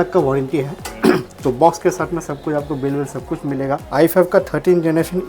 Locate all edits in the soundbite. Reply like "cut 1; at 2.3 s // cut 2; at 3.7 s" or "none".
cut 1; at 3.8 s